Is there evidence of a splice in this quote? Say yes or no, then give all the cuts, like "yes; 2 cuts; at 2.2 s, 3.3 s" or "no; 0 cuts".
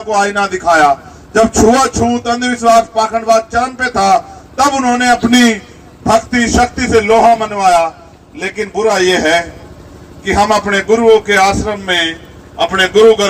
no; 0 cuts